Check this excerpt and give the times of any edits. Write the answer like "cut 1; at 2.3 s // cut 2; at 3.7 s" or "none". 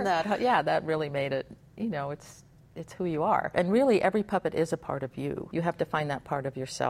cut 1; at 3.5 s // cut 2; at 5.4 s